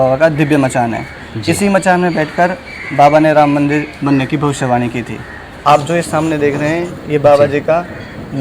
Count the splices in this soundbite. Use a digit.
1